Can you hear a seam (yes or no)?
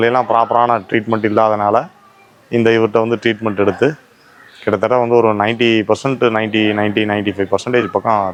no